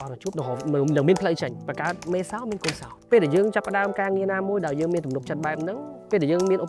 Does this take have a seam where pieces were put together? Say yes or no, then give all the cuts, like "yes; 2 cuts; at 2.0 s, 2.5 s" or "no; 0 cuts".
yes; 2 cuts; at 1.6 s, 2.9 s